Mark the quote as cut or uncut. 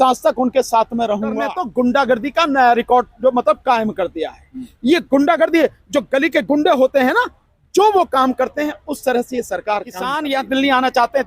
cut